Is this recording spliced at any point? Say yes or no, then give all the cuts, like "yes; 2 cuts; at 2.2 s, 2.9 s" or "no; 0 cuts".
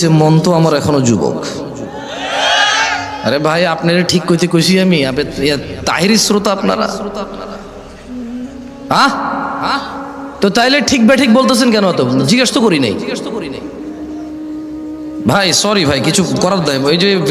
yes; 2 cuts; at 13.6 s, 14.9 s